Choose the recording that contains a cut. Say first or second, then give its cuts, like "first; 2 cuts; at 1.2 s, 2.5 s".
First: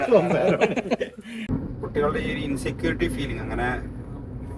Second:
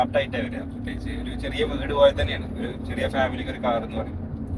first; 1 cut; at 1.4 s